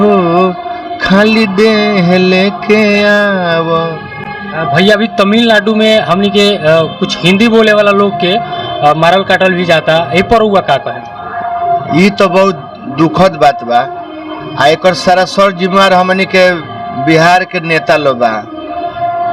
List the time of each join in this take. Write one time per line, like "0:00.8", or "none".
none